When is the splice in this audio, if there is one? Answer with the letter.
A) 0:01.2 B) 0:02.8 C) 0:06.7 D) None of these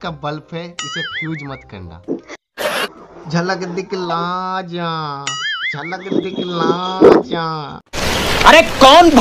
B